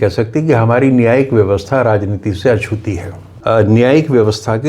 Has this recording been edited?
yes; 1 cut; at 3.2 s

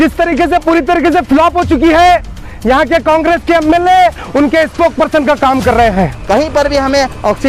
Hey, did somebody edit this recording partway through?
yes; 1 cut; at 6.2 s

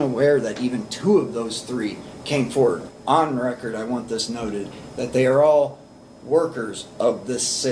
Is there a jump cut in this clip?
yes; 1 cut; at 2.8 s

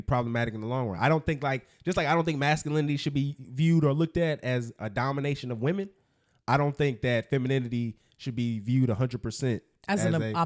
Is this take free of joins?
yes; 0 cuts

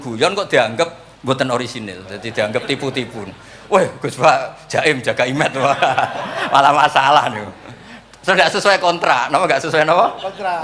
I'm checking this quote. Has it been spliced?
yes; 1 cut; at 1.1 s

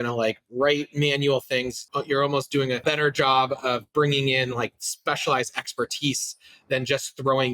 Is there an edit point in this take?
yes; 2 cuts; at 1.9 s, 2.8 s

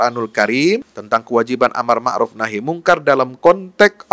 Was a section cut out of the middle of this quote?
yes; 1 cut; at 0.9 s

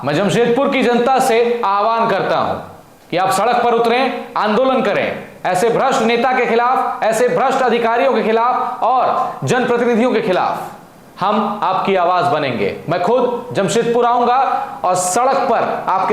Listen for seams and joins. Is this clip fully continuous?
yes; 0 cuts

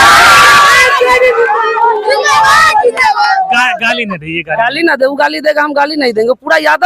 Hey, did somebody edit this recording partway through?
no; 0 cuts

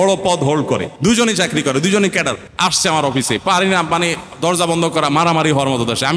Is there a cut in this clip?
yes; 2 cuts; at 0.9 s, 2.5 s

